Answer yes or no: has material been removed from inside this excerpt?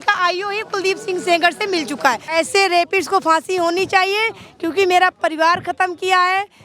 yes